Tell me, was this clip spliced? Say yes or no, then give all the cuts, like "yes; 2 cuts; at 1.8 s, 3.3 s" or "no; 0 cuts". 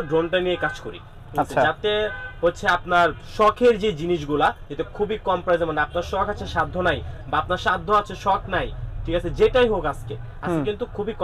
no; 0 cuts